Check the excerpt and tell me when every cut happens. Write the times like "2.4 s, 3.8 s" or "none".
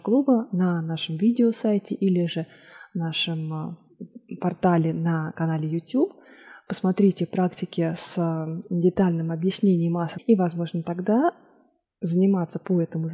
10.1 s